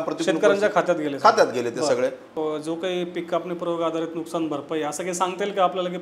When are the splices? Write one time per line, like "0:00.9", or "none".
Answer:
0:02.3